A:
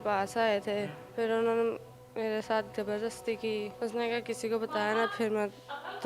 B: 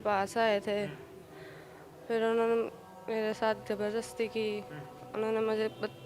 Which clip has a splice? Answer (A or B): A